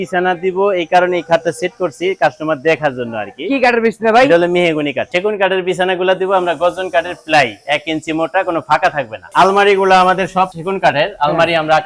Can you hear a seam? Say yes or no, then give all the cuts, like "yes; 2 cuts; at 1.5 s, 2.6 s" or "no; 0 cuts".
yes; 2 cuts; at 5.1 s, 9.3 s